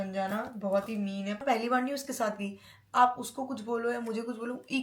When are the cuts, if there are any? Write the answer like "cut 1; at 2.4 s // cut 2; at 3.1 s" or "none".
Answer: cut 1; at 1.4 s